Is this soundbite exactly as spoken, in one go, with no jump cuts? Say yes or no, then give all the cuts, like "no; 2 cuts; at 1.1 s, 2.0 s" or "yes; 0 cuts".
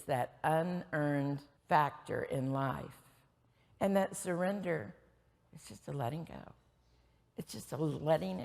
no; 1 cut; at 1.5 s